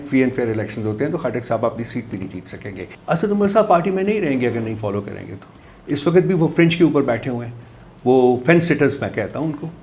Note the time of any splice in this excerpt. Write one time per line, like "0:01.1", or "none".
0:02.9